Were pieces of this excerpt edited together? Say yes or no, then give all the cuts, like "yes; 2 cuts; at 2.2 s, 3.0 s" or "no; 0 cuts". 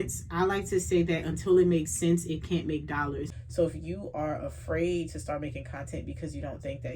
yes; 1 cut; at 3.3 s